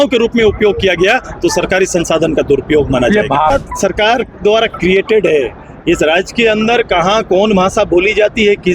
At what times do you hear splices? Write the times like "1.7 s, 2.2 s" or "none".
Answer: 3.5 s